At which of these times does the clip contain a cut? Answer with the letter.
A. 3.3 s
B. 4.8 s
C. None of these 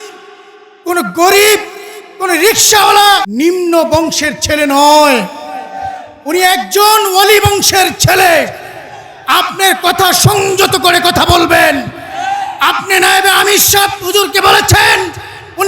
A